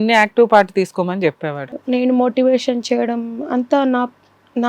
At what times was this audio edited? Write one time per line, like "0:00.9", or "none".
0:01.6